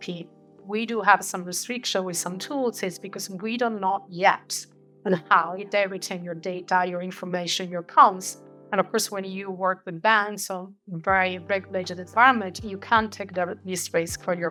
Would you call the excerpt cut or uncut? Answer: uncut